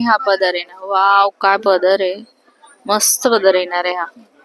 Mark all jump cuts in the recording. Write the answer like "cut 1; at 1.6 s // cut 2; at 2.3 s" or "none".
none